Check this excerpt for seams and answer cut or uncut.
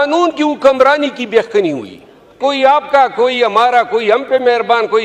cut